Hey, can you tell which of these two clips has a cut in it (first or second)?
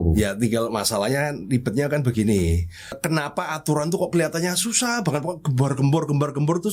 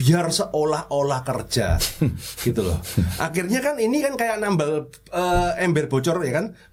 first